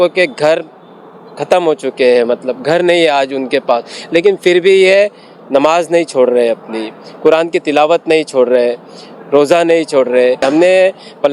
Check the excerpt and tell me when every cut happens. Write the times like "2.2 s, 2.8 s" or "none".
10.4 s